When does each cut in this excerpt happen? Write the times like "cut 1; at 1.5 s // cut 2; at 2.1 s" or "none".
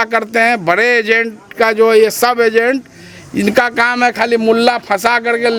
none